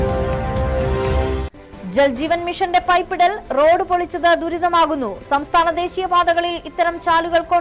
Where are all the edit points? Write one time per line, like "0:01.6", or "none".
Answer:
none